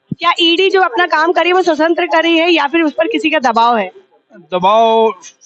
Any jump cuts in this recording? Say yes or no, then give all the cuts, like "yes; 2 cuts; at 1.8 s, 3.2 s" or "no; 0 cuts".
no; 0 cuts